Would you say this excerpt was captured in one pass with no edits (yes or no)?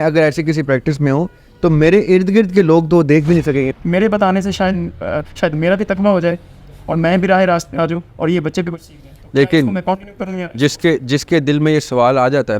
no